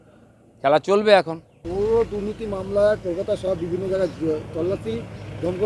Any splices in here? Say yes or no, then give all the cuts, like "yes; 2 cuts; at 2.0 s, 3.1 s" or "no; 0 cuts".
yes; 1 cut; at 1.4 s